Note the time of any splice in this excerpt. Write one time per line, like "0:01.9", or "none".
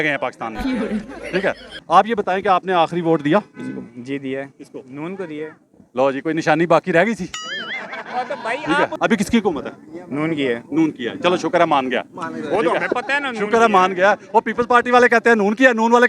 0:01.7
0:08.9